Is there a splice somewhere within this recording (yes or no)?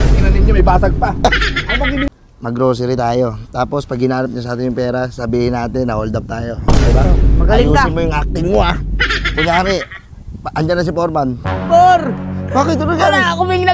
yes